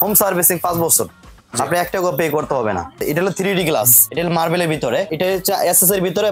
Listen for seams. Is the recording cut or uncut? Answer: cut